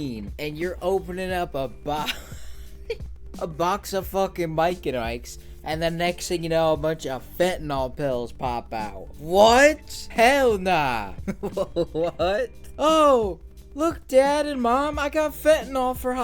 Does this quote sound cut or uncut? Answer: cut